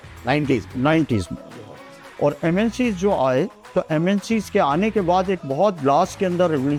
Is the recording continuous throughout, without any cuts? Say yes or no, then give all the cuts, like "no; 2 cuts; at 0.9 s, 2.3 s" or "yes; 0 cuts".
yes; 0 cuts